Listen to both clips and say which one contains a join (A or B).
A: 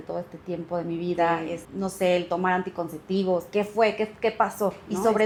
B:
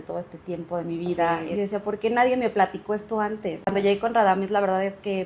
B